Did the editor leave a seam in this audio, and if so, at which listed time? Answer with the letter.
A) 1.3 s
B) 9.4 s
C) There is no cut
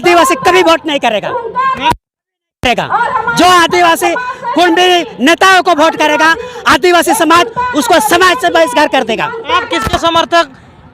B